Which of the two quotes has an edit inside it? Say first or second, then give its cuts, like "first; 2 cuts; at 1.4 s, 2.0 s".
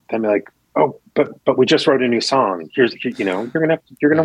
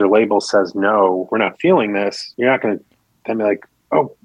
second; 2 cuts; at 1.3 s, 2.2 s